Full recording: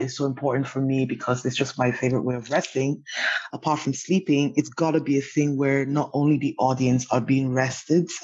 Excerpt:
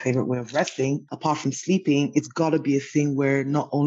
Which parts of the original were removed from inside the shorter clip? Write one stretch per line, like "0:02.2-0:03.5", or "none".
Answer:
0:03.1-0:03.5